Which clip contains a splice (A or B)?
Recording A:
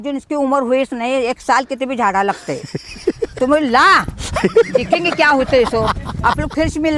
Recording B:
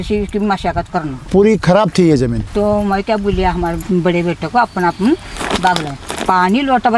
B